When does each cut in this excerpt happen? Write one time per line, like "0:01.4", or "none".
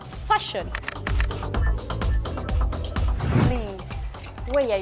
none